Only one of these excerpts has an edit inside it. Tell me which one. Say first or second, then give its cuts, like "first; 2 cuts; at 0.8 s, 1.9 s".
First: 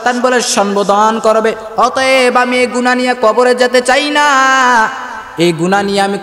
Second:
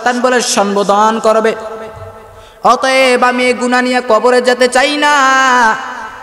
first; 1 cut; at 1.6 s